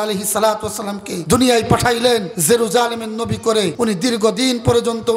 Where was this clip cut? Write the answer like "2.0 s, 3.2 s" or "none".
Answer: 1.1 s, 2.3 s, 3.7 s

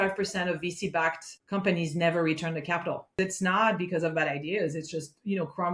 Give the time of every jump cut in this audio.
3.2 s

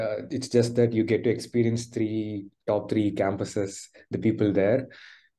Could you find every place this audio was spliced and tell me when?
none

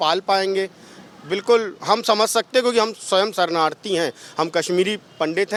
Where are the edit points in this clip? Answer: none

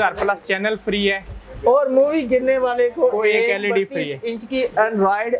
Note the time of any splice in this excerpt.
none

